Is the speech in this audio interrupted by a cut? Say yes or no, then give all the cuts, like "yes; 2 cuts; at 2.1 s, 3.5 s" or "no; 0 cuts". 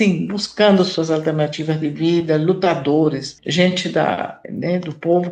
no; 0 cuts